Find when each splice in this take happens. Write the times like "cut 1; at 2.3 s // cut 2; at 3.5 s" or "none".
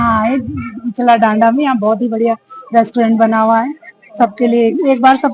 none